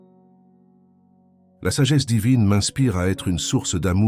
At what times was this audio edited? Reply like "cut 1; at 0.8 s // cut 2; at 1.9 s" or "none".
cut 1; at 1.1 s